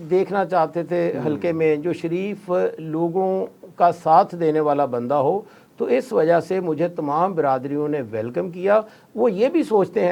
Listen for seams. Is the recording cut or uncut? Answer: uncut